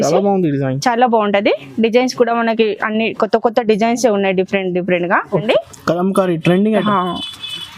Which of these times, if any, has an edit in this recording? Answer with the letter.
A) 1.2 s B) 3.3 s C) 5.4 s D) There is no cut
C